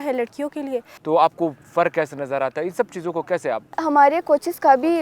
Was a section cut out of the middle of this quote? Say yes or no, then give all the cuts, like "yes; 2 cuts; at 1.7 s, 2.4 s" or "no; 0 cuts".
yes; 2 cuts; at 0.9 s, 3.8 s